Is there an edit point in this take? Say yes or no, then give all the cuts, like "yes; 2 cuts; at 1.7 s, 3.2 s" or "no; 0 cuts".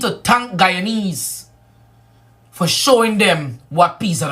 yes; 1 cut; at 1.6 s